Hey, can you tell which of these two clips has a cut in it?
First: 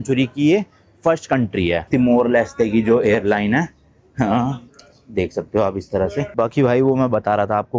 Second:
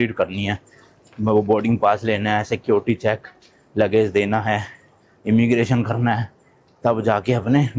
first; 2 cuts; at 1.8 s, 6.3 s

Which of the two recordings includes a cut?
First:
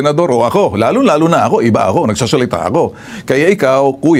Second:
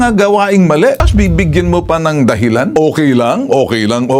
second; 2 cuts; at 1.1 s, 2.7 s

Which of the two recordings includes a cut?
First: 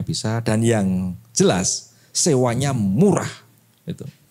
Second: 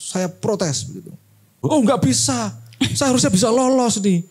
second; 1 cut; at 1.6 s

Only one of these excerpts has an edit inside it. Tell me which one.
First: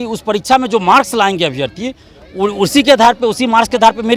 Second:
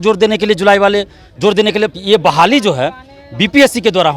second; 1 cut; at 1.9 s

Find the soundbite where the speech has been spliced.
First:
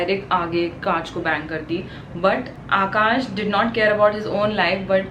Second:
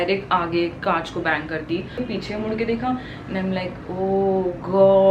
second; 1 cut; at 2.0 s

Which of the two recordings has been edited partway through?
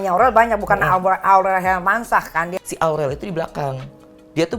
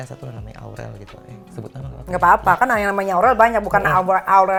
first; 1 cut; at 2.5 s

